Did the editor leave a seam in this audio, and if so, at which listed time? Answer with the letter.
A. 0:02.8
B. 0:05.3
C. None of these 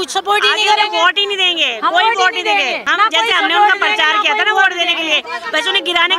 A